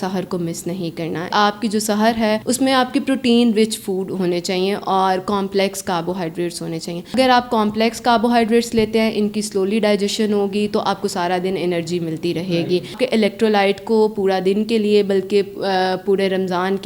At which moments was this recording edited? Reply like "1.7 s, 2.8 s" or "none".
1.3 s, 2.4 s, 7.1 s, 12.9 s